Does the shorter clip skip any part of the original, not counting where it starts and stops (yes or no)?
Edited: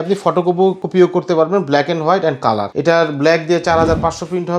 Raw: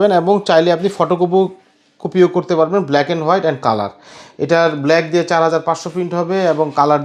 yes